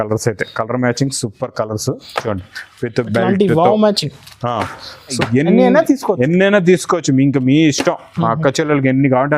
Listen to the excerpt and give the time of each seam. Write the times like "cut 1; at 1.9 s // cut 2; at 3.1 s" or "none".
cut 1; at 5.2 s